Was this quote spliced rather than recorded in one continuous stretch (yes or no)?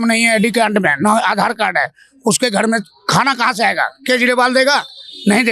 no